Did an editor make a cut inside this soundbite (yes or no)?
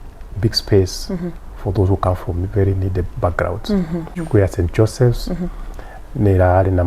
yes